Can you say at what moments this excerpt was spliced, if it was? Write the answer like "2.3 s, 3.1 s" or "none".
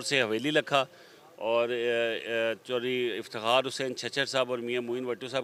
none